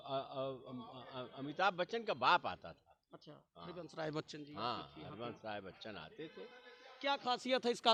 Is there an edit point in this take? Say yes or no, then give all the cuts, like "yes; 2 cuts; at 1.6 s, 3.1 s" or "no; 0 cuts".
no; 0 cuts